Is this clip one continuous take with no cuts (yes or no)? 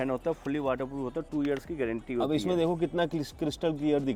yes